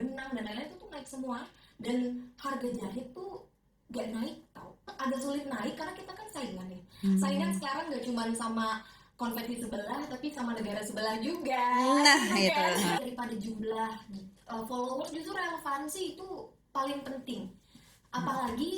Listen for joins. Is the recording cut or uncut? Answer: cut